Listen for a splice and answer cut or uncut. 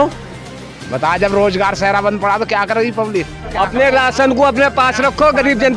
cut